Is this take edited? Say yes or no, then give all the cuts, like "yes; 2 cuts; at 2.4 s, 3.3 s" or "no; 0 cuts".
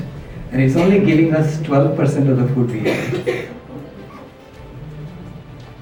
no; 0 cuts